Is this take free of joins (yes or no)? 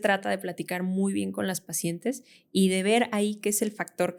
yes